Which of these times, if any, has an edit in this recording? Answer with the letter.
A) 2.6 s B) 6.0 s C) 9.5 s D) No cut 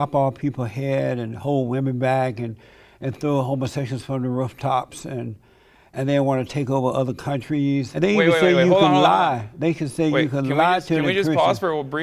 D